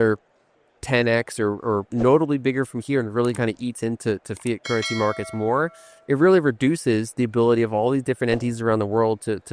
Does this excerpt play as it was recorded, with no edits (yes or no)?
yes